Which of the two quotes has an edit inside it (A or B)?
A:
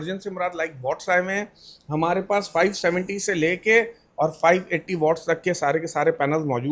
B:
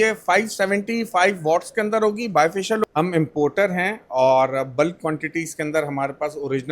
B